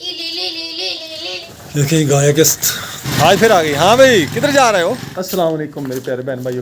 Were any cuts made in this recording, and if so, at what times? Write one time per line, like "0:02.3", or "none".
0:01.4
0:03.1
0:05.1